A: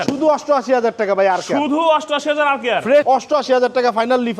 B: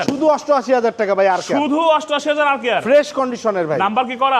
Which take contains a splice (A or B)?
A